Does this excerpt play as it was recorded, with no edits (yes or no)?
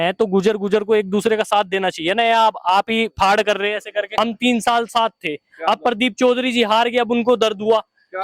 no